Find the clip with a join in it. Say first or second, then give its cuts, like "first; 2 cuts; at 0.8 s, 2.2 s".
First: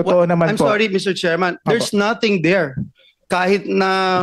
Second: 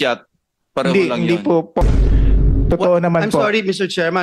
second; 1 cut; at 1.8 s